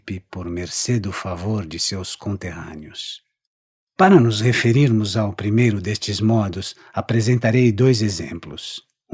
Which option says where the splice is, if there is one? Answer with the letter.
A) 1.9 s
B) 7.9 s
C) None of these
A